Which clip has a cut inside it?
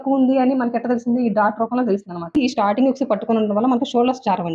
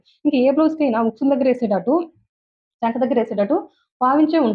first; 1 cut; at 2.4 s

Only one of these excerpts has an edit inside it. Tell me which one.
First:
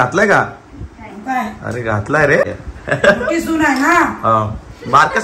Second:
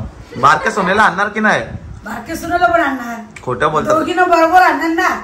first; 1 cut; at 2.4 s

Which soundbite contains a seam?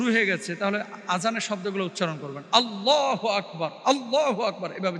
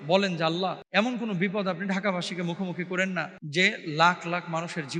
second; 2 cuts; at 0.8 s, 3.4 s

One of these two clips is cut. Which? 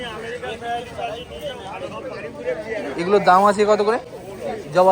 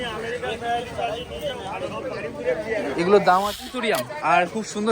second; 1 cut; at 3.6 s

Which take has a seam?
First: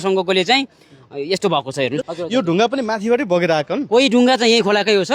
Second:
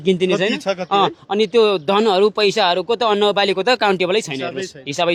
first; 1 cut; at 2.1 s

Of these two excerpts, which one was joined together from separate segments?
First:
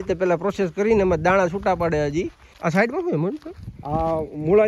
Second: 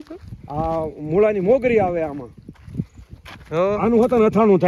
first; 1 cut; at 2.4 s

